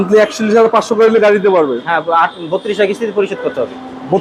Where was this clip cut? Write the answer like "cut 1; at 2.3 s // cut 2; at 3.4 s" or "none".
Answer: none